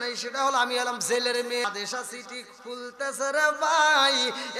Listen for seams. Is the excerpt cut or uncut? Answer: cut